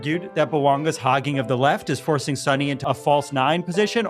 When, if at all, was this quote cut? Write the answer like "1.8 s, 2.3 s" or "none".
2.8 s